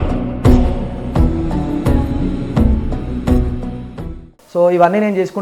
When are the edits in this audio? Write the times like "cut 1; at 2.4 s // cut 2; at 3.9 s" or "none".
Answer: cut 1; at 4.3 s